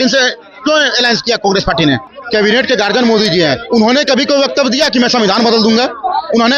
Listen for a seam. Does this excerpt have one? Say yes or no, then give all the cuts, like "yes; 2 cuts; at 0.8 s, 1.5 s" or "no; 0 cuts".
yes; 1 cut; at 2.1 s